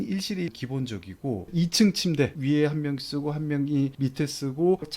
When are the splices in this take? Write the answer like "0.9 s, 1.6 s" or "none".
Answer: 1.5 s, 2.4 s